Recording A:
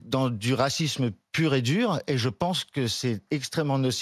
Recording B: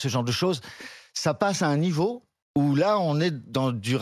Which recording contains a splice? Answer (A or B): B